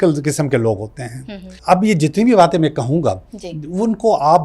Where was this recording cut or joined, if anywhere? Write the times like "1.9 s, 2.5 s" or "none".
1.5 s